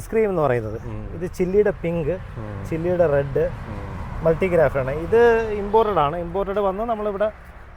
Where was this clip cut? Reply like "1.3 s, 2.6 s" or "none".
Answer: none